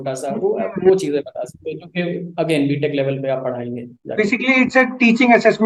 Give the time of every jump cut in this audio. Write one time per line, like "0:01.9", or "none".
none